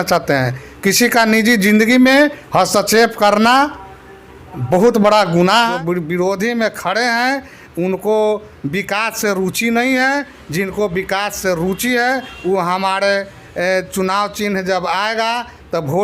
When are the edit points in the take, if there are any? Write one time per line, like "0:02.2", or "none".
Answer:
0:05.7